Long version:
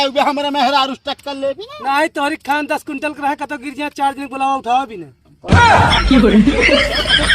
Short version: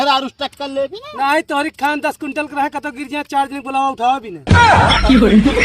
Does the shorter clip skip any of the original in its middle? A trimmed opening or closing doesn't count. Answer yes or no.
yes